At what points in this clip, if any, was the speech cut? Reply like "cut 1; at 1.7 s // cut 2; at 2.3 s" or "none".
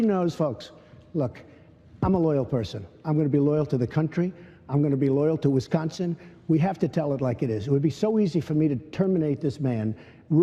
cut 1; at 8.7 s